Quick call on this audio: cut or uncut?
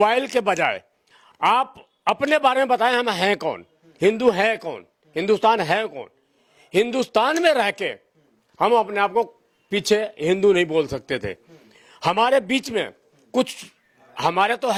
uncut